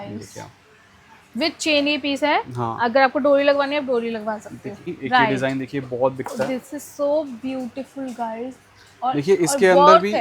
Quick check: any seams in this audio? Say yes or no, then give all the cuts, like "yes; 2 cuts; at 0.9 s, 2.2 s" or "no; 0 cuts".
yes; 1 cut; at 4.9 s